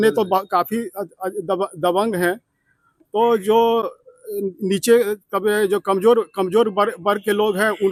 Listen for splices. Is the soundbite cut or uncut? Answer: uncut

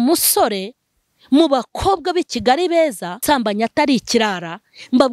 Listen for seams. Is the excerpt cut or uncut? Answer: cut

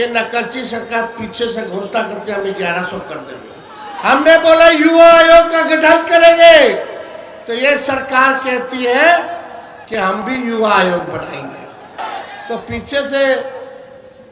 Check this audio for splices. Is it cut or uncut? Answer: cut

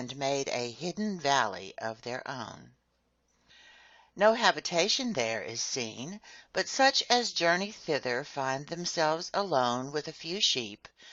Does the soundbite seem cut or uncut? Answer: uncut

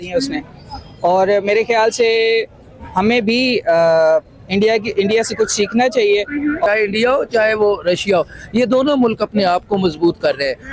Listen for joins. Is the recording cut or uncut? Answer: cut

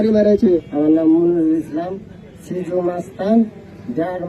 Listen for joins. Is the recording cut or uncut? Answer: uncut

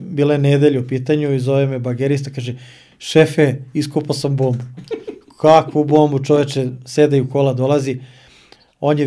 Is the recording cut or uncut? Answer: uncut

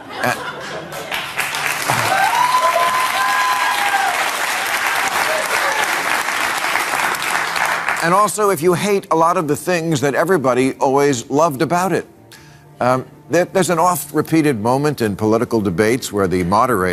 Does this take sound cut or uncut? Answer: uncut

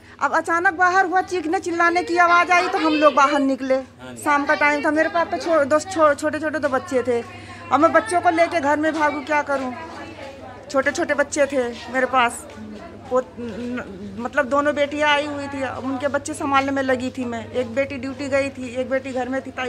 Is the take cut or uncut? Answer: uncut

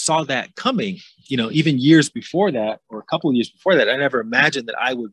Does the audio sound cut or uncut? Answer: uncut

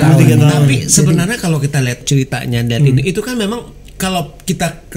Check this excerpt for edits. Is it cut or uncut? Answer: cut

